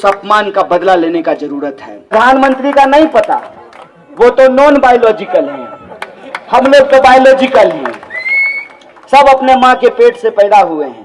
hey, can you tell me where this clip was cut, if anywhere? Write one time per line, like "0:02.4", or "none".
0:02.1